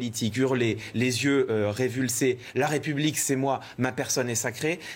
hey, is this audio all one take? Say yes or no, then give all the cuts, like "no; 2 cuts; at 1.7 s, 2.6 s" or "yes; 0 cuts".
yes; 0 cuts